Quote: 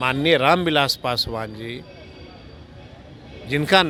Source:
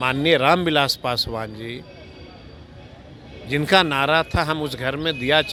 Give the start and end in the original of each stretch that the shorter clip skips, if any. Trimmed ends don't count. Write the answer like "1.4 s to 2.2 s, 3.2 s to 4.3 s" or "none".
none